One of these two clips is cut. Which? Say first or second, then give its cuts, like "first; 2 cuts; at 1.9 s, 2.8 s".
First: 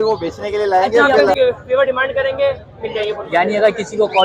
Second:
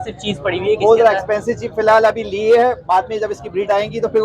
first; 1 cut; at 1.4 s